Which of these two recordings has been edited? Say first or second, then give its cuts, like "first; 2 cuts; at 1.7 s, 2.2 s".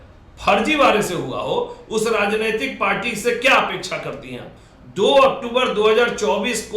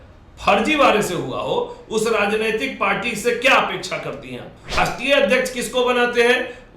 second; 1 cut; at 4.8 s